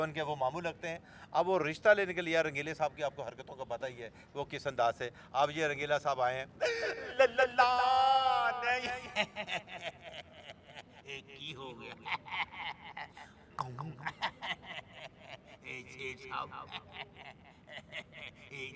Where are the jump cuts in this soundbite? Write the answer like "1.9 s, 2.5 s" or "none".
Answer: none